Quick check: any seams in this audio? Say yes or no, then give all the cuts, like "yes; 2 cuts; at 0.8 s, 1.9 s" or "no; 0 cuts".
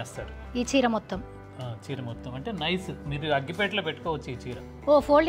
no; 0 cuts